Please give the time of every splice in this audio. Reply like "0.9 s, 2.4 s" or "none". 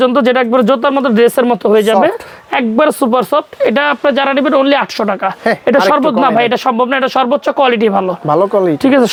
none